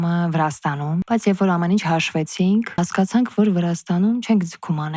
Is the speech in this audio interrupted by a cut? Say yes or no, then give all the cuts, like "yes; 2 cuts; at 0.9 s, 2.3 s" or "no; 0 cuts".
yes; 2 cuts; at 1.0 s, 2.8 s